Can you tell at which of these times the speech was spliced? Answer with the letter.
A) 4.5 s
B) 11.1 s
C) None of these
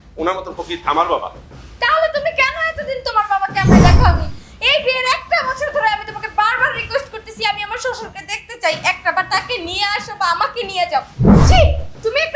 B